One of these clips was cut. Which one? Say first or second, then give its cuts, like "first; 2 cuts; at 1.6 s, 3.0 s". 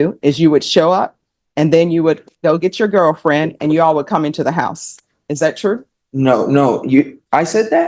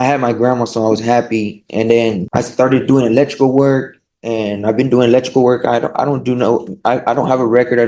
second; 1 cut; at 2.2 s